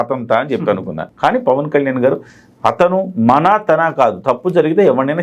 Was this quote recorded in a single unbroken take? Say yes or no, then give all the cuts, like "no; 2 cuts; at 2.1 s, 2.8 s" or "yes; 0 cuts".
no; 1 cut; at 1.1 s